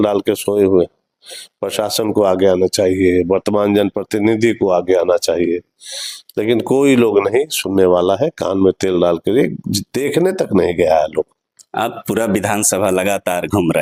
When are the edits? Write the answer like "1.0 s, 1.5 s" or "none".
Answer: none